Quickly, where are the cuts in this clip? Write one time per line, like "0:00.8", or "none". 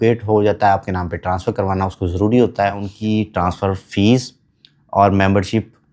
0:02.9